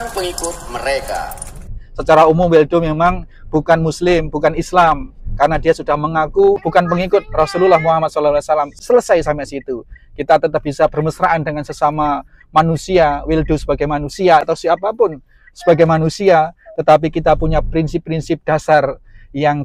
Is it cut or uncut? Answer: cut